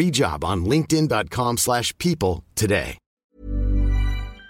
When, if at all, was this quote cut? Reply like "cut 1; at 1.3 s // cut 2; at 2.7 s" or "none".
cut 1; at 3.0 s